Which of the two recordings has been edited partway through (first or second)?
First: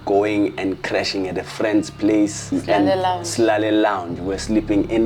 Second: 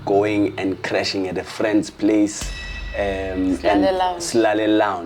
first